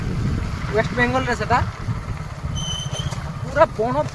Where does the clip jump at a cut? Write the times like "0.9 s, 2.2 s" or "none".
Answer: none